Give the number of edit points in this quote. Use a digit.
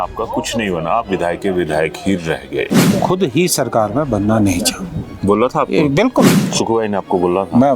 2